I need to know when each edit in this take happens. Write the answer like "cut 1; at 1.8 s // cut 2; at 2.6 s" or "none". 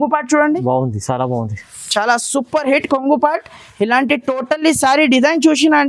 none